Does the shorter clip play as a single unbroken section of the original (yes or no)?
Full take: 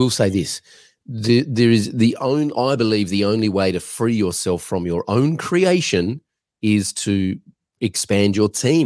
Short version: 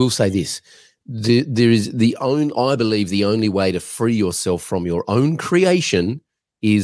yes